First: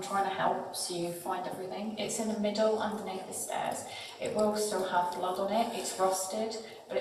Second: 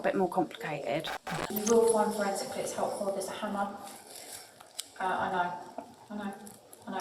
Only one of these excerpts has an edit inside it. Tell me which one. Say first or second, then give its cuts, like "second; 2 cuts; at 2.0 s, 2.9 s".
second; 1 cut; at 1.5 s